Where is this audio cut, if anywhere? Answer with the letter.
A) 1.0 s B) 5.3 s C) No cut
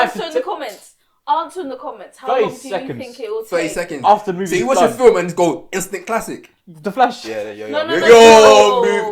C